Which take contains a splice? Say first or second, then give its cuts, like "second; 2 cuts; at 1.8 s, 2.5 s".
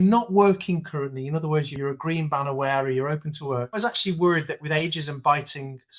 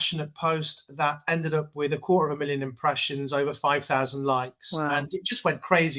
first; 2 cuts; at 1.8 s, 3.8 s